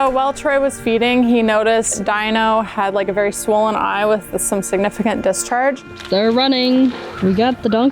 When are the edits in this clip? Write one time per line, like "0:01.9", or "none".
0:02.0
0:05.9
0:06.9